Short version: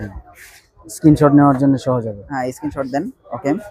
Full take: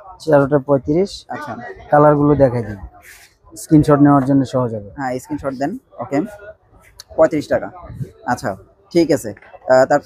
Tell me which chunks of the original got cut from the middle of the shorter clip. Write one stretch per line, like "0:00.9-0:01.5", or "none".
none